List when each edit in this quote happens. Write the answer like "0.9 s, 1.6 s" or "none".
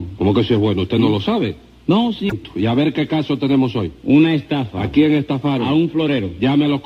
2.3 s